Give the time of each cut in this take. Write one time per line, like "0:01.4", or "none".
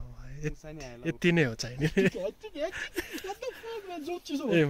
none